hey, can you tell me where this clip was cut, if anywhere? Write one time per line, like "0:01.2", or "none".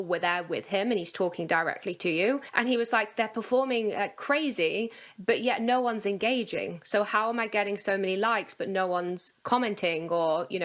0:02.5

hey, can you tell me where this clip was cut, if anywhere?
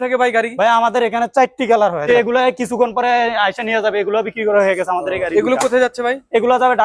0:02.1

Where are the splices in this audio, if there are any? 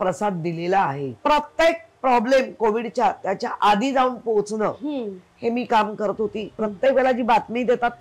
0:01.1
0:06.5

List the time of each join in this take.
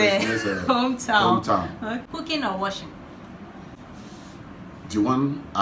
0:02.1
0:03.8

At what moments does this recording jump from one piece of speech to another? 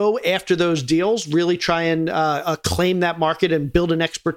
none

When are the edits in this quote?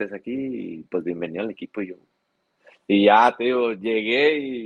none

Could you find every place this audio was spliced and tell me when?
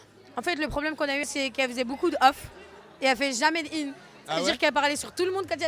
0:01.2

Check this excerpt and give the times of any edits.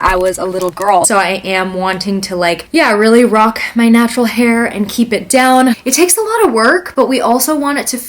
0:01.1
0:05.8

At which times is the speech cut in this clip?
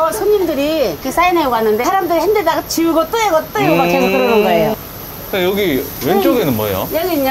0:01.0
0:01.8
0:04.8

